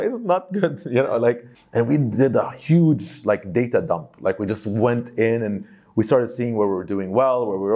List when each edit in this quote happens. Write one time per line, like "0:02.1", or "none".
0:01.5